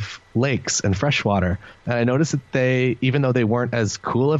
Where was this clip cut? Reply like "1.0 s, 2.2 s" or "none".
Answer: none